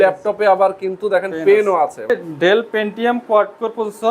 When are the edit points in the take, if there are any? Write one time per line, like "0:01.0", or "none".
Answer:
0:02.1